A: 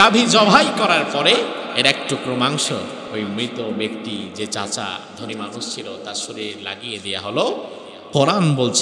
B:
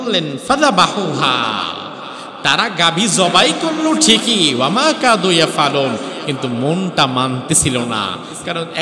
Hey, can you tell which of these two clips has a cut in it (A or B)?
A